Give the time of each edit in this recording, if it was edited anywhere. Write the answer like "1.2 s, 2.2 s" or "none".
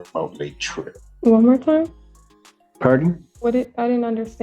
1.0 s